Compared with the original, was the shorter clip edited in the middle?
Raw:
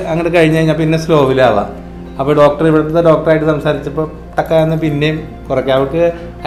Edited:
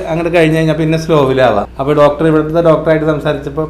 yes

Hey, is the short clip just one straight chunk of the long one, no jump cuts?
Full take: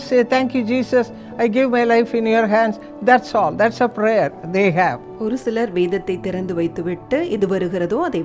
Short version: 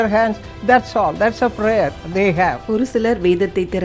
no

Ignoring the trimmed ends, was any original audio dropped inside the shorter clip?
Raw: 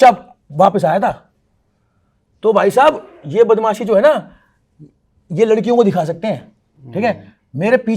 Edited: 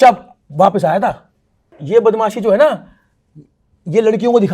yes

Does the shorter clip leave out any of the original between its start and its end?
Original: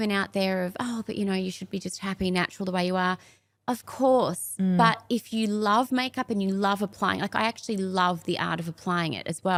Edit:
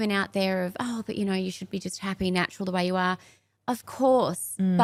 no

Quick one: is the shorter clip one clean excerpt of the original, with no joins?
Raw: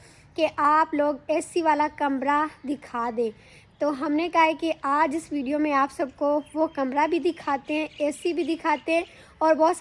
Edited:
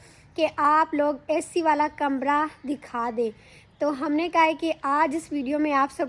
yes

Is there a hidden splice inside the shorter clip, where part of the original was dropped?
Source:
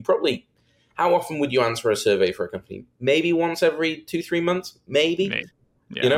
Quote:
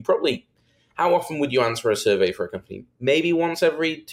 no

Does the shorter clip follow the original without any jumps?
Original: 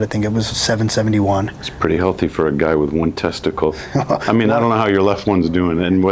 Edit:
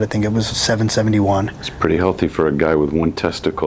yes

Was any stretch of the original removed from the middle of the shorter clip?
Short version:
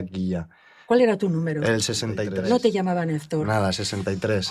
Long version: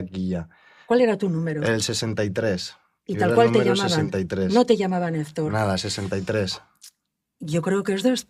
yes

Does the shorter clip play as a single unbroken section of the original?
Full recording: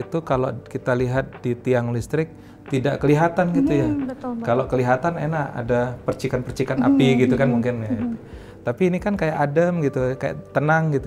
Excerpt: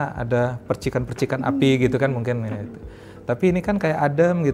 yes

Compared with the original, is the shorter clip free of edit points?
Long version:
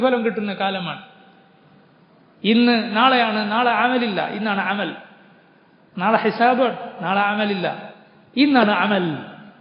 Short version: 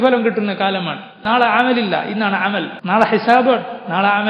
no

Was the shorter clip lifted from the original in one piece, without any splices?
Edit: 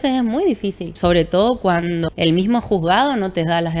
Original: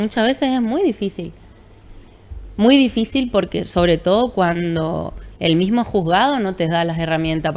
no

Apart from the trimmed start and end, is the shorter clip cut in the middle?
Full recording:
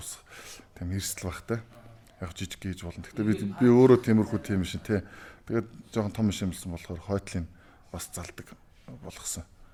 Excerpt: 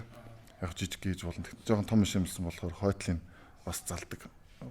yes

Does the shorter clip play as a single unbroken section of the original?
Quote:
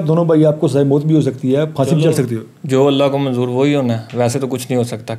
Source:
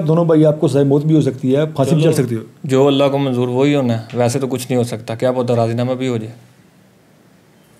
yes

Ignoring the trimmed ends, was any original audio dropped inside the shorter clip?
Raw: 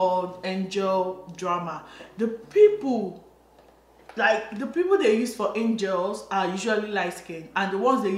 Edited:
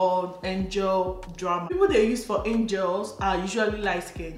yes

